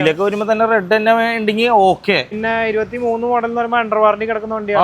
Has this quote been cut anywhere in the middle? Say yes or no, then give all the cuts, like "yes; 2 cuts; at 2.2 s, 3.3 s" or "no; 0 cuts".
yes; 1 cut; at 2.4 s